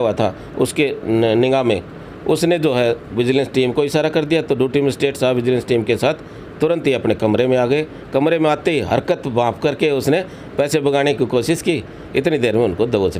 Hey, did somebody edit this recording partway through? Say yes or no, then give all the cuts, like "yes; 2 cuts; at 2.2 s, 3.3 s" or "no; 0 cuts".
no; 0 cuts